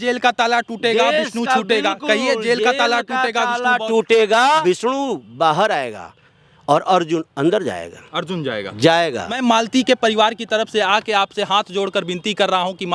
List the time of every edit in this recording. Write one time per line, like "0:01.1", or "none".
0:04.6
0:09.4